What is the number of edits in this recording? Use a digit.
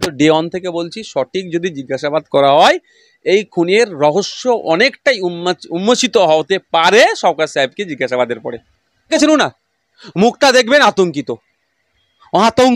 1